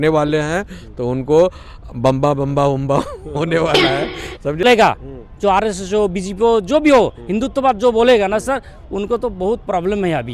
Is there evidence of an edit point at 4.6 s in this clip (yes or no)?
yes